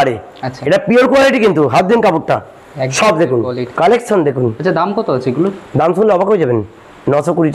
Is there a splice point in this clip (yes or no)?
yes